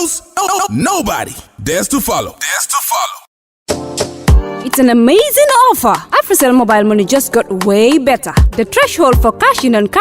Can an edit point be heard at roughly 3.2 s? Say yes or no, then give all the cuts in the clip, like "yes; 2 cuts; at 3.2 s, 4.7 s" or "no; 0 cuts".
yes; 1 cut; at 3.2 s